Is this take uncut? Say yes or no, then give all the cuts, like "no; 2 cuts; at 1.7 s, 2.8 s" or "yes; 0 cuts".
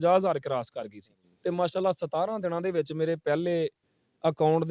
yes; 0 cuts